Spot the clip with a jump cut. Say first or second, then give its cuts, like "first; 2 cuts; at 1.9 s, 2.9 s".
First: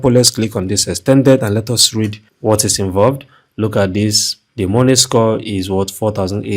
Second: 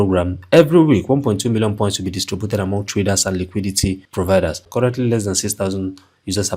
second; 1 cut; at 4.6 s